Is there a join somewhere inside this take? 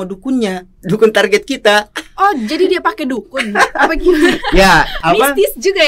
yes; 1 cut; at 4.9 s

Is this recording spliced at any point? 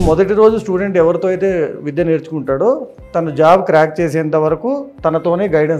no; 0 cuts

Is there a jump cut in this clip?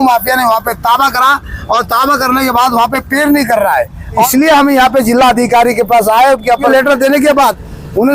yes; 2 cuts; at 4.3 s, 6.7 s

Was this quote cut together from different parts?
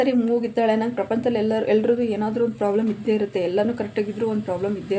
no; 0 cuts

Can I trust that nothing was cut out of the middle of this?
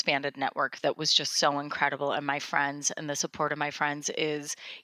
yes; 0 cuts

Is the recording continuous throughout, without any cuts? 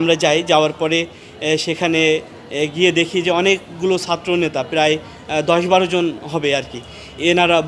yes; 0 cuts

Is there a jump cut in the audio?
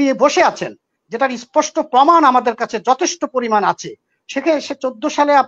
no; 0 cuts

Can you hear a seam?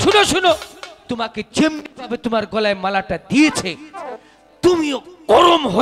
no; 0 cuts

